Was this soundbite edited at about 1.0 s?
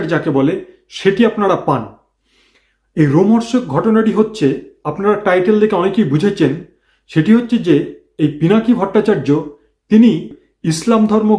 no; 1 cut; at 10.4 s

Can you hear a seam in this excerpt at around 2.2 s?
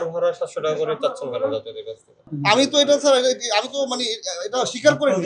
yes; 1 cut; at 2.2 s

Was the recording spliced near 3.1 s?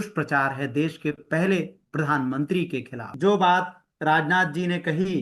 yes; 1 cut; at 3.1 s

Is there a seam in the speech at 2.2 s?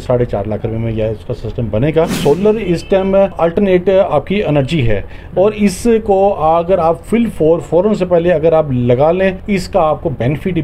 yes; 4 cuts; at 2.2 s, 3.3 s, 7.0 s, 9.4 s

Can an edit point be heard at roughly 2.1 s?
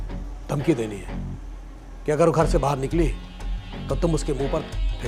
no; 0 cuts

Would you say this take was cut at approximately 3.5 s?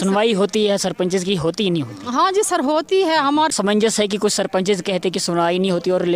yes; 1 cut; at 3.5 s

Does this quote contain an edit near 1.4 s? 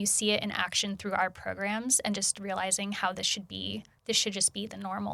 no; 1 cut; at 3.9 s

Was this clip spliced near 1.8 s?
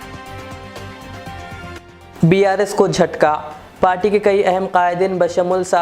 yes; 1 cut; at 1.8 s

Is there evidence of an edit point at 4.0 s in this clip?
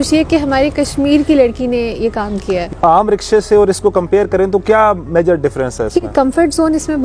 no; 2 cuts; at 2.7 s, 6.1 s

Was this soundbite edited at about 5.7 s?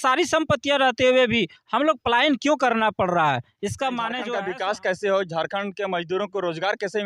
no; 1 cut; at 4.2 s

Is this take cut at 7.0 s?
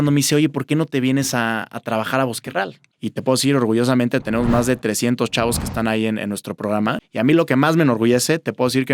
yes; 2 cuts; at 2.8 s, 7.0 s

